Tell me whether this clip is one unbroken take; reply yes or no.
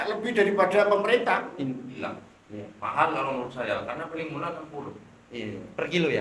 no